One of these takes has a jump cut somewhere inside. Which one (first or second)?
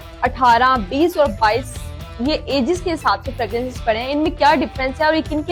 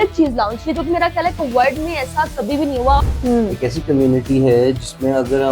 second